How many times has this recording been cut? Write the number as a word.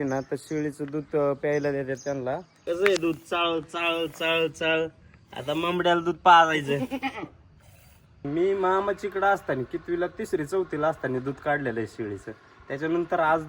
two